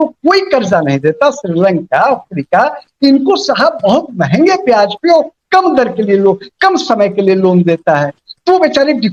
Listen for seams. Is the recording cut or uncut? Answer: uncut